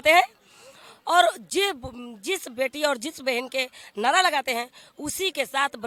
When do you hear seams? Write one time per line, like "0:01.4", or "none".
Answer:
none